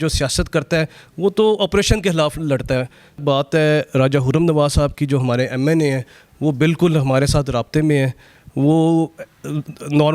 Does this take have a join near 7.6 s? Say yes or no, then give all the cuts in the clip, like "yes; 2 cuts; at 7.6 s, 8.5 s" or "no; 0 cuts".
no; 1 cut; at 3.2 s